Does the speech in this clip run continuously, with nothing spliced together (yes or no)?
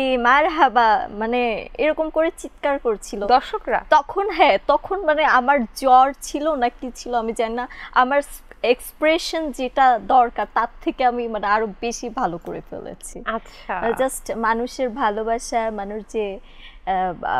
yes